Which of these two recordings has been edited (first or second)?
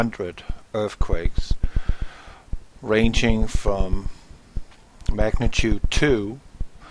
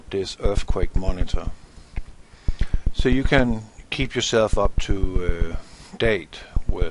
second